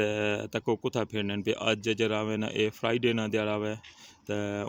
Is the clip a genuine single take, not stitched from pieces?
yes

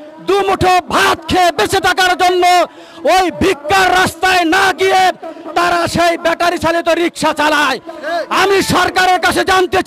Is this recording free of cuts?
yes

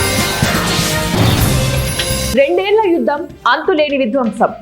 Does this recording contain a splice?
yes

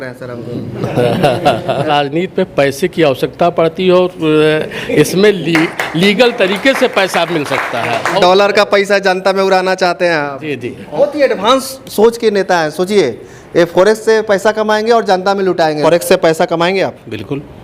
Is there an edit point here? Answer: yes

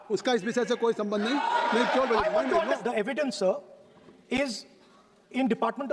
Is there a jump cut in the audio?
yes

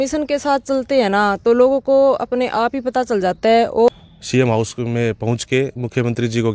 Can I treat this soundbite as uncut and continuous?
no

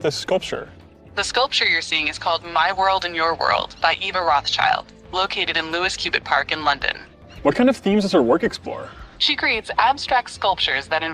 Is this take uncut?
yes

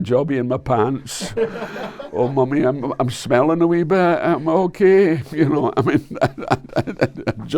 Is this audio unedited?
yes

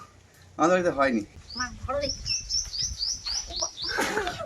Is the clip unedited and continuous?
no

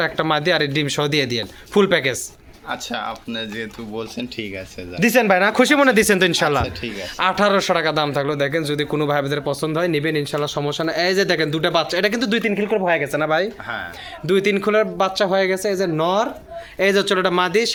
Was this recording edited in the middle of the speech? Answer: no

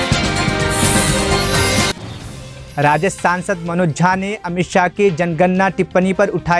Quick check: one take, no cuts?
yes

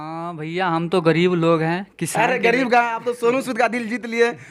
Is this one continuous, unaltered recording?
yes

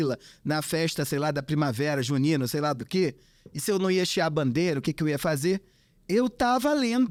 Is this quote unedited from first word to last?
yes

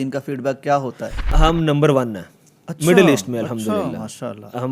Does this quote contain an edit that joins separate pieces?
yes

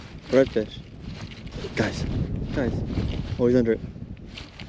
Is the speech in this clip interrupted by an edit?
yes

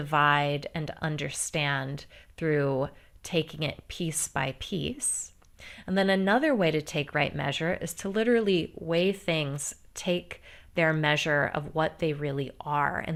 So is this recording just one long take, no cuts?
yes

